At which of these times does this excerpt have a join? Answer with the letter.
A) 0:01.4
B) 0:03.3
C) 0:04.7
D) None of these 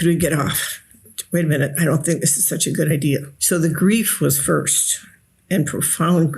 B